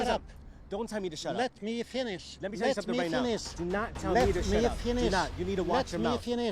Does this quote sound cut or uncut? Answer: uncut